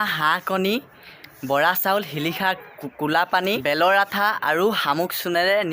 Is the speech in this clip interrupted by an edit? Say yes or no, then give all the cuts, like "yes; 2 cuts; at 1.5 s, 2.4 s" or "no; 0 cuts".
no; 0 cuts